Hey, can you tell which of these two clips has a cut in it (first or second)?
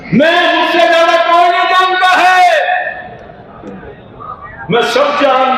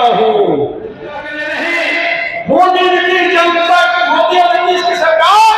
second